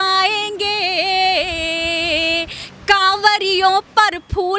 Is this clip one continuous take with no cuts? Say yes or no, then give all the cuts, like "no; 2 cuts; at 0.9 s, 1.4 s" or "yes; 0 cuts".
yes; 0 cuts